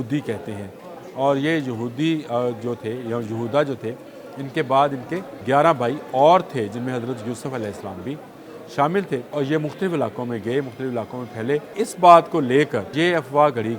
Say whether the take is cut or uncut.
cut